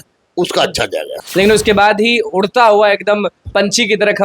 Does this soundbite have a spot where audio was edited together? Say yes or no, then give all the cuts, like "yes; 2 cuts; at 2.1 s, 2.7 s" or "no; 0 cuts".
yes; 1 cut; at 1.2 s